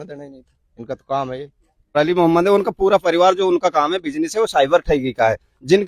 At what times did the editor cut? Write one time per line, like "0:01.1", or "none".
0:01.9